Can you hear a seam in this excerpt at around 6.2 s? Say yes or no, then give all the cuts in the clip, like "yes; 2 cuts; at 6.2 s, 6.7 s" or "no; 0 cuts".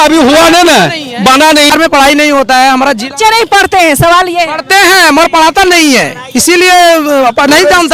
no; 1 cut; at 1.7 s